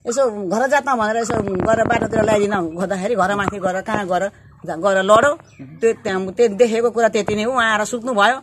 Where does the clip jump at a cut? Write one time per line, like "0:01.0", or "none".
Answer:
none

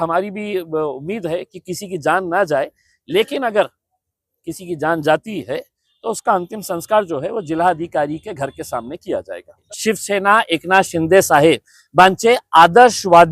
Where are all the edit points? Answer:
0:09.7

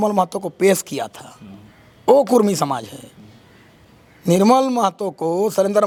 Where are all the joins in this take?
none

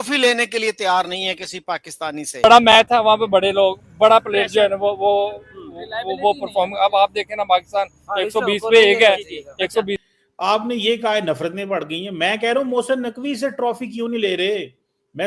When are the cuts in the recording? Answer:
0:02.4
0:10.0

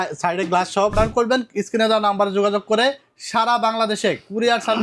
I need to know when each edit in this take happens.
0:00.9

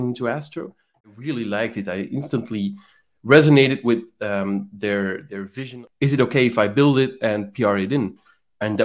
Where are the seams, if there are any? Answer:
0:01.1
0:05.6

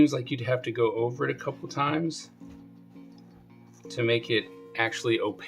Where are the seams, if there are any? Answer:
0:02.1
0:03.6

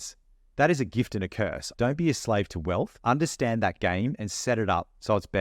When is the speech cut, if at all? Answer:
0:01.7
0:02.9

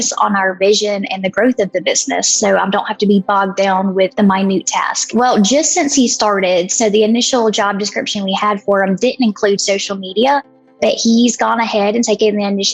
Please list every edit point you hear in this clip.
0:04.1
0:05.1

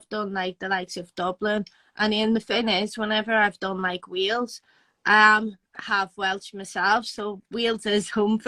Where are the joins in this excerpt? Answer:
none

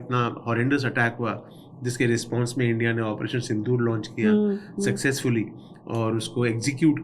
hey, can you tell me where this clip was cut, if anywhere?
none

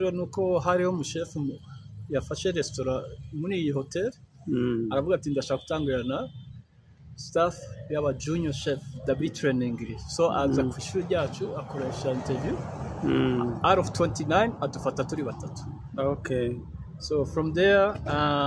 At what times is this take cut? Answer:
none

